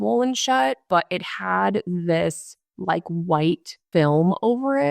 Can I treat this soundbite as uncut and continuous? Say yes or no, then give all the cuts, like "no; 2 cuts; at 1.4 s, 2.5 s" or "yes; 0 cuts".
no; 2 cuts; at 0.8 s, 3.8 s